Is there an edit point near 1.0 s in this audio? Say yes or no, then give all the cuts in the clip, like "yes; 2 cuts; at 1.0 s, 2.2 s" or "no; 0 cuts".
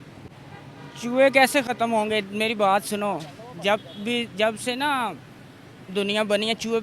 no; 0 cuts